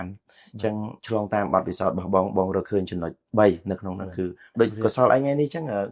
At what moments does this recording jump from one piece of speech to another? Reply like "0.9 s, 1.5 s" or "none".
4.5 s